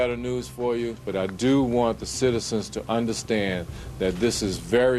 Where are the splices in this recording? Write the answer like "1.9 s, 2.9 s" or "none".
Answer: 1.0 s